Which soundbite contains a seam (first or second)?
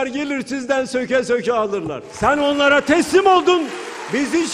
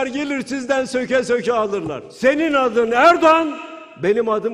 first